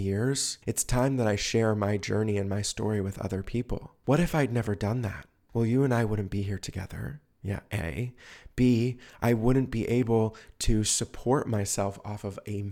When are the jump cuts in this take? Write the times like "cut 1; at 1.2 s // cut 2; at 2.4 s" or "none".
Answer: cut 1; at 3.9 s